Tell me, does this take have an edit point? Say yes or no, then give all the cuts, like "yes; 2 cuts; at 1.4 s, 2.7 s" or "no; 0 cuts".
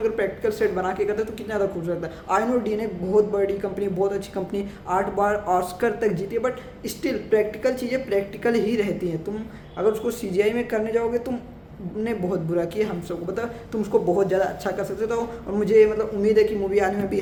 no; 0 cuts